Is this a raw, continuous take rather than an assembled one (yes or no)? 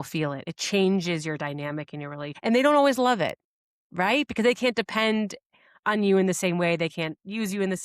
no